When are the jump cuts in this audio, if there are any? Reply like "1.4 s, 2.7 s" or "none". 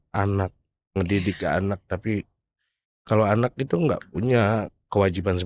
none

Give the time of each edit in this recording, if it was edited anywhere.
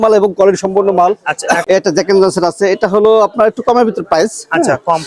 1.6 s

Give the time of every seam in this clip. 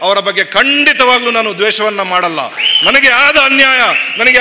2.7 s

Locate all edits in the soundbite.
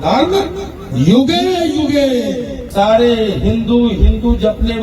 2.7 s

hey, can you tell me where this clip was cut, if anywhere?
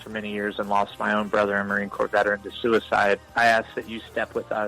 0.9 s

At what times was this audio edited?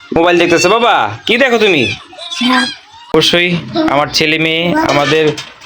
3.1 s

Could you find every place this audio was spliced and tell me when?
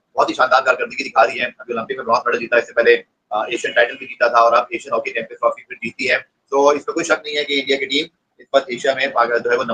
none

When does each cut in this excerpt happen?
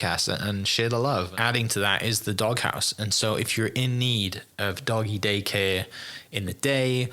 1.3 s

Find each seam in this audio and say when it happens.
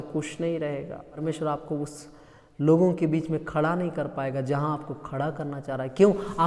1.2 s

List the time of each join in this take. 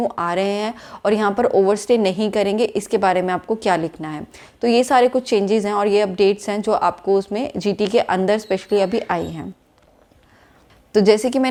none

